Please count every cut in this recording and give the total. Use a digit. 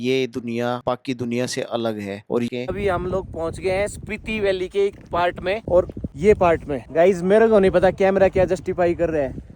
1